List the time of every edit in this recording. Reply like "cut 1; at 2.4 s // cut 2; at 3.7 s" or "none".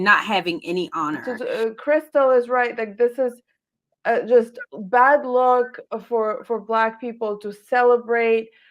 cut 1; at 1.3 s